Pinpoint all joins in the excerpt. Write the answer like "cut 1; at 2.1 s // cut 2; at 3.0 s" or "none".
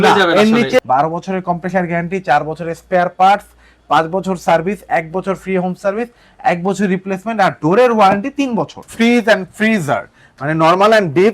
cut 1; at 0.8 s // cut 2; at 8.8 s